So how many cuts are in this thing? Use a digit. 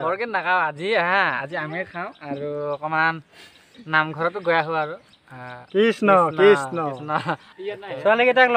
1